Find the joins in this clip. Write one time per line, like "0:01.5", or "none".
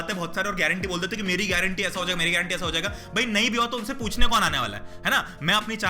none